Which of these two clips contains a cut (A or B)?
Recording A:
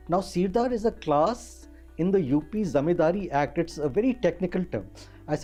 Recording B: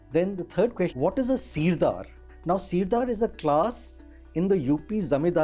B